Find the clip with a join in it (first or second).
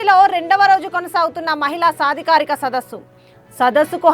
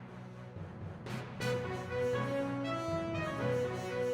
second